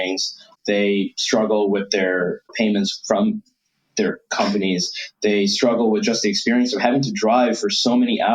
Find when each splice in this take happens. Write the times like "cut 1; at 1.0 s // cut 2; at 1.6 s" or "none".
none

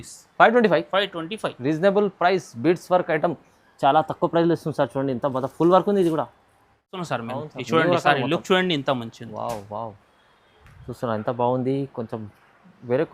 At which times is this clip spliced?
cut 1; at 7.0 s

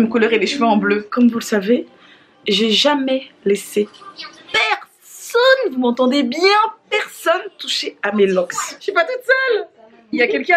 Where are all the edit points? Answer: cut 1; at 1.1 s // cut 2; at 8.8 s

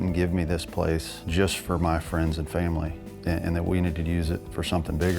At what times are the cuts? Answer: cut 1; at 1.2 s // cut 2; at 3.0 s

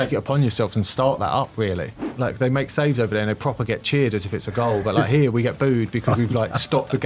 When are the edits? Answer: cut 1; at 1.9 s

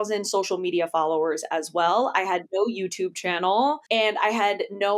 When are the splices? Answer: cut 1; at 3.8 s

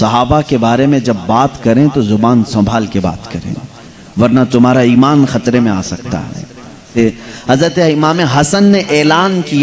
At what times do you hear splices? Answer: cut 1; at 6.9 s

